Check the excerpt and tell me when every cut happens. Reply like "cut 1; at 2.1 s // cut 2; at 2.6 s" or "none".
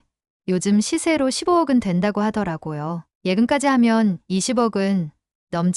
none